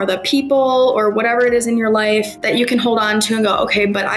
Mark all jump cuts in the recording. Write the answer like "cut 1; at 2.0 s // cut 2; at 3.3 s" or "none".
cut 1; at 2.4 s